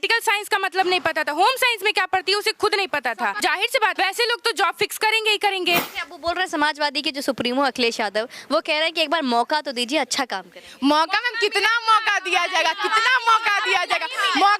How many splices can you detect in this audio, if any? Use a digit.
2